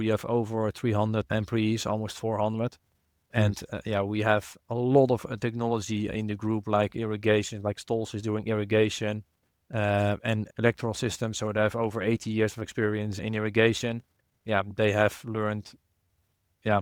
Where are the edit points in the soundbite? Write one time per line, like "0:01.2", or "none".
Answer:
none